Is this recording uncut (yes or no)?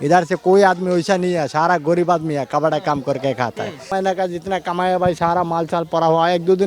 no